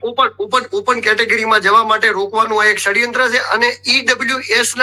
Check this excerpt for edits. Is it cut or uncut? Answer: uncut